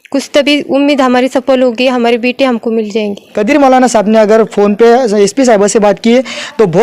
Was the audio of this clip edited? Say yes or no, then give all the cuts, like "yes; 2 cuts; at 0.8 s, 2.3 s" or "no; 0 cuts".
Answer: yes; 1 cut; at 3.3 s